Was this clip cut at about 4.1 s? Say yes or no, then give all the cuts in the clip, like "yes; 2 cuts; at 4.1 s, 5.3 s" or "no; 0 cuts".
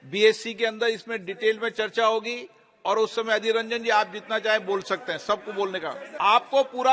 no; 1 cut; at 6.0 s